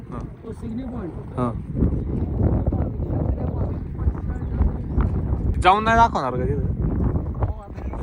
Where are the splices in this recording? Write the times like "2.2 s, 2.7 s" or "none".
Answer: 5.5 s